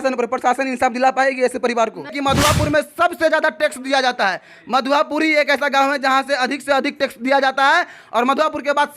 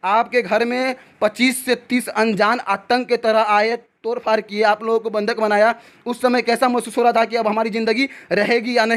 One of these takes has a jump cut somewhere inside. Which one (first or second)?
first